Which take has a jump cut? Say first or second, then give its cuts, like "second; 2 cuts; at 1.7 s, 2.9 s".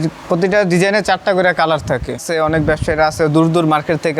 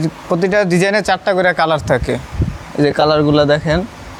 first; 1 cut; at 2.3 s